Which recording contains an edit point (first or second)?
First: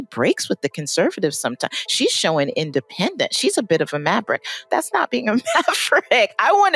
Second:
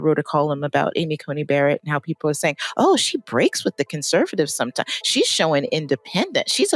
first